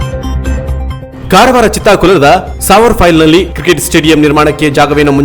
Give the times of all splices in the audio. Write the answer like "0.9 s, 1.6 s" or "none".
none